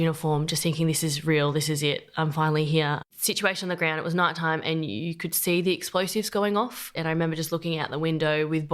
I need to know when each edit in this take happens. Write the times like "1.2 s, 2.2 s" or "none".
3.1 s, 6.9 s